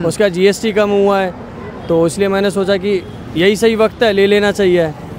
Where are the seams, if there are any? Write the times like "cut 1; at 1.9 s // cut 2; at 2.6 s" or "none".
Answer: none